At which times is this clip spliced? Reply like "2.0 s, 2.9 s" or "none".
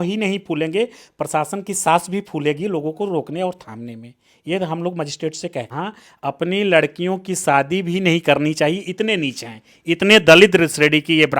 5.7 s

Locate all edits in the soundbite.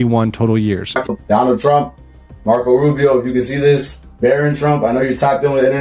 1.0 s

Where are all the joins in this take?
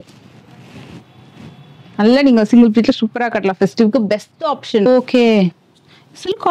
4.9 s

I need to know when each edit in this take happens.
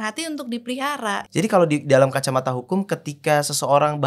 1.2 s

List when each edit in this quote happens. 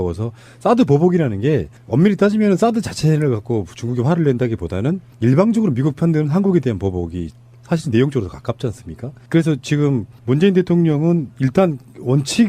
7.9 s

